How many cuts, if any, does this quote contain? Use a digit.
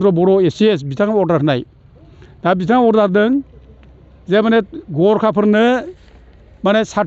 0